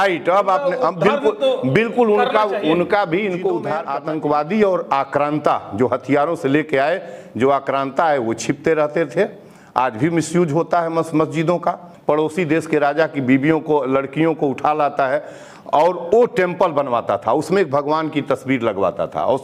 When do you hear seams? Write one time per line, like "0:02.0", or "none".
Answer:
0:03.8
0:11.9